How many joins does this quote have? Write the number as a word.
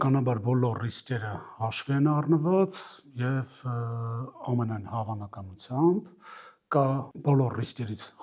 zero